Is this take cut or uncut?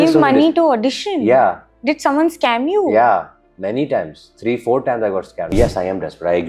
cut